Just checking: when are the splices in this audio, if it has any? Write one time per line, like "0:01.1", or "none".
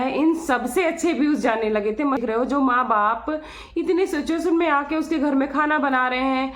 0:02.2